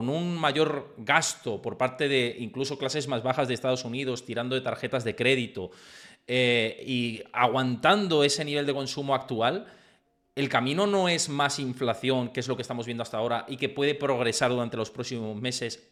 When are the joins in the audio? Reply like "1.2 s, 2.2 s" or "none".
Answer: none

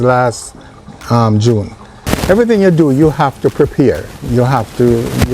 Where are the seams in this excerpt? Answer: 2.0 s

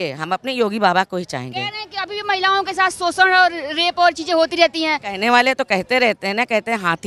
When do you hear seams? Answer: none

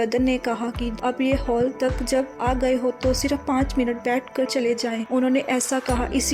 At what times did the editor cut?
1.0 s

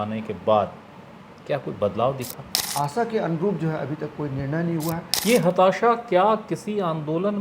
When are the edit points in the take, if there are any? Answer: 2.6 s, 5.1 s

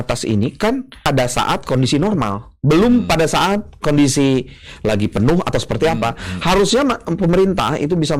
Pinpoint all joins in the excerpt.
1.0 s

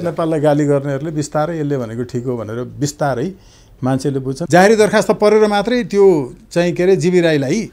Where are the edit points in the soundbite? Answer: 4.5 s

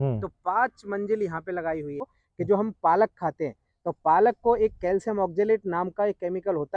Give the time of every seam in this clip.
2.2 s

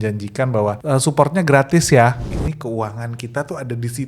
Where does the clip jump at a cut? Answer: 0.8 s, 2.3 s

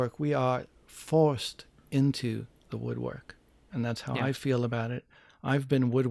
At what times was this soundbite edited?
none

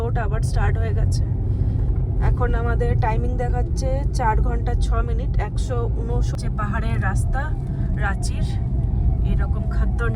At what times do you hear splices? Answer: 6.3 s

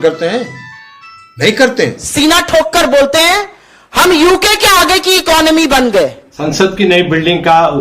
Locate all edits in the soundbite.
2.0 s, 6.3 s

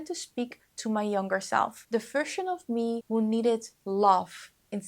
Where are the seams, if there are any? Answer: 1.8 s, 3.0 s

